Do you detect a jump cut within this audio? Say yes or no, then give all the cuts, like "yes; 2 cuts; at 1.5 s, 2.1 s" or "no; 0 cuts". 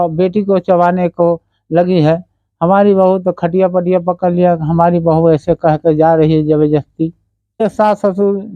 yes; 1 cut; at 7.6 s